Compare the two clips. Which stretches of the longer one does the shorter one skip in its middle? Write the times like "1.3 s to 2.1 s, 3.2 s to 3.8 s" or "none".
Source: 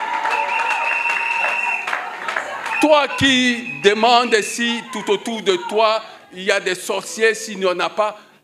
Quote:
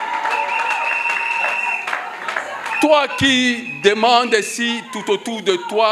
none